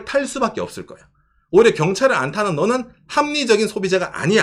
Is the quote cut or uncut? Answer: uncut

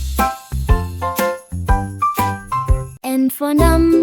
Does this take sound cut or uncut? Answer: cut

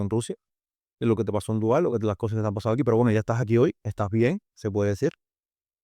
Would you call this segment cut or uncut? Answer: uncut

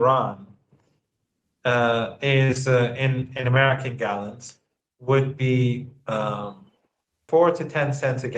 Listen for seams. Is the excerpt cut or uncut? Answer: cut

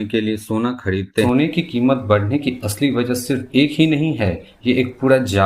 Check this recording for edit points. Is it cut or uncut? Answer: cut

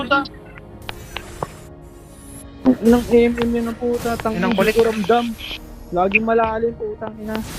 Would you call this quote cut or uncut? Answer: cut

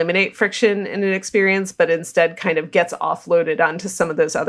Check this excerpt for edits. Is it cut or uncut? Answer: uncut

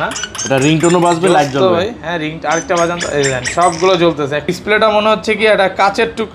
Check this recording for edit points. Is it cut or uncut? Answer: cut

